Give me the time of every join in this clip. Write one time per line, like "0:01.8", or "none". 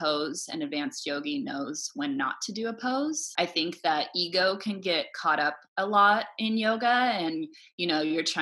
0:03.2